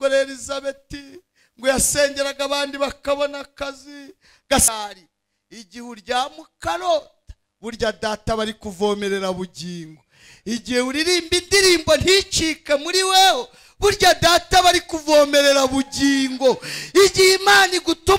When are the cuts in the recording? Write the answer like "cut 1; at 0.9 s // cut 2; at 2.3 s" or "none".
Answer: cut 1; at 4.7 s